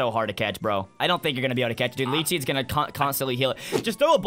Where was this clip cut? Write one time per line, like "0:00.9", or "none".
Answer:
0:00.9